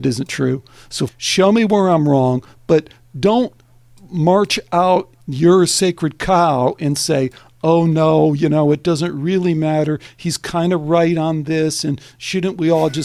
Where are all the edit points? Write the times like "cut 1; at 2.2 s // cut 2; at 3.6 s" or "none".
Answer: cut 1; at 1.1 s // cut 2; at 5.2 s